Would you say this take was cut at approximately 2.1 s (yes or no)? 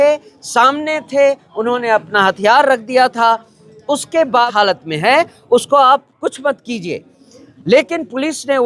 no